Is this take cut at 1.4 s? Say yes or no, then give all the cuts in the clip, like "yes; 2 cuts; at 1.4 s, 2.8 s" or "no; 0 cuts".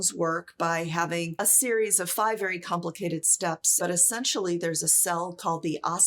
yes; 2 cuts; at 1.4 s, 3.8 s